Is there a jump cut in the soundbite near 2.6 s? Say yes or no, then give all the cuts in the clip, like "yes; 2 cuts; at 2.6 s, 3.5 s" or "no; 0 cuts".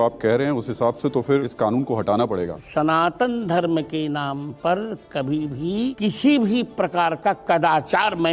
yes; 3 cuts; at 1.5 s, 2.6 s, 6.0 s